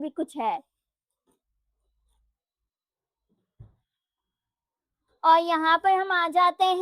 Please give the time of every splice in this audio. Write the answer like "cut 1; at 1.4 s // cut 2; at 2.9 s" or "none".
none